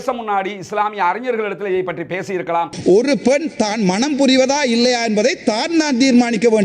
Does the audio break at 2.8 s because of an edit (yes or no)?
yes